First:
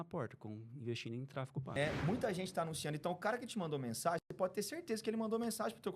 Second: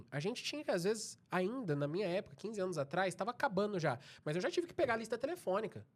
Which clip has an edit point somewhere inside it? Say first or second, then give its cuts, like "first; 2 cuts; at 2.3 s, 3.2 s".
first; 1 cut; at 1.8 s